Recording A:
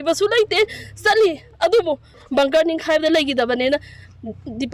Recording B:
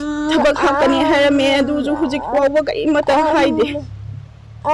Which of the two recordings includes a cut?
A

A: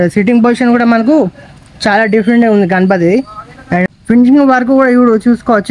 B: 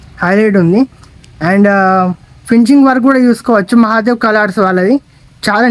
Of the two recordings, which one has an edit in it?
A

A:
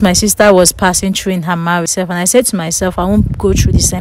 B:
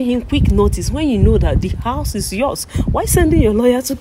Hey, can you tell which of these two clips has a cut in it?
A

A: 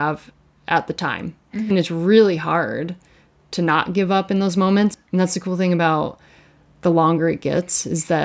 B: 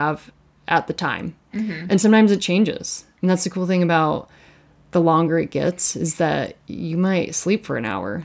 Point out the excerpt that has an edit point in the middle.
A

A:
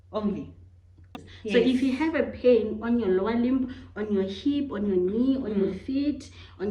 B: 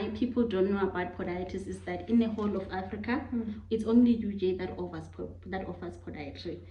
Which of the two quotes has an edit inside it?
A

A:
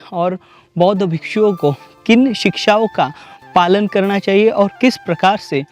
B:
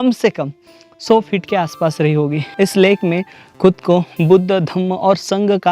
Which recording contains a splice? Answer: B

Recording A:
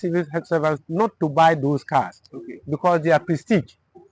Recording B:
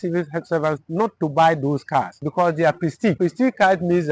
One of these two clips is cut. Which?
B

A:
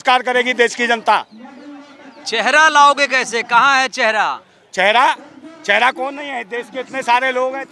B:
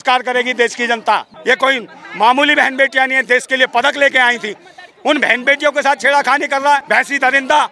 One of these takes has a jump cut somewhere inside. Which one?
B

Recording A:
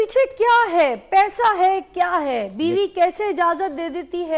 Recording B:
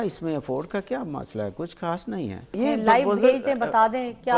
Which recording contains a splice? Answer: B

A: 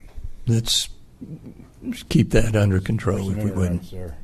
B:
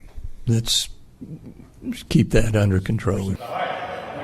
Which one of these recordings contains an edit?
B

